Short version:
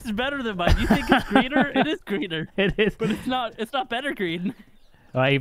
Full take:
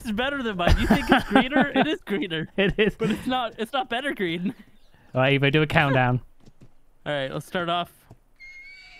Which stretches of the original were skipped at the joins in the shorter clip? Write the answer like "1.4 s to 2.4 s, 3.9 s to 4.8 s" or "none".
none

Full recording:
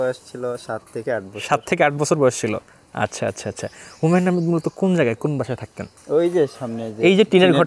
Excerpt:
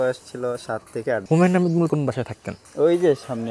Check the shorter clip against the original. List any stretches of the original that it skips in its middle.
1.2 s to 4.0 s, 4.6 s to 5.2 s

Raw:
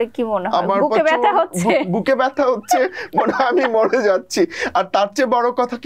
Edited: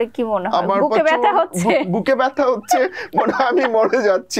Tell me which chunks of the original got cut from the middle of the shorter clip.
none

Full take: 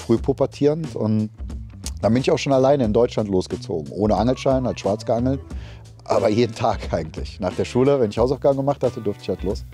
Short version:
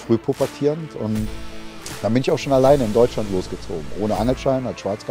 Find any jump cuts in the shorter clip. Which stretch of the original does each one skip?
none

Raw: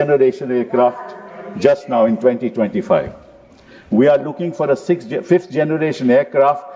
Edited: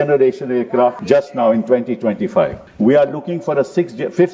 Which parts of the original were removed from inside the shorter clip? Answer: 1.0 s to 1.5 s, 3.2 s to 3.8 s

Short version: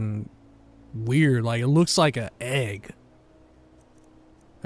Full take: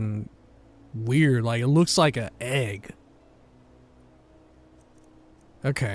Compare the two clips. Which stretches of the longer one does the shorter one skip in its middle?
3.0 s to 4.0 s

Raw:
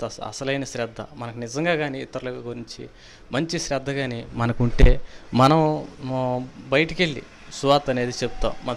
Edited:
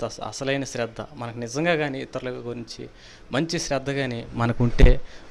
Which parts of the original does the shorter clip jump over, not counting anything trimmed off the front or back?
none

